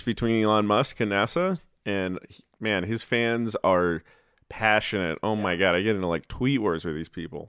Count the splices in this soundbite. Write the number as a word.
zero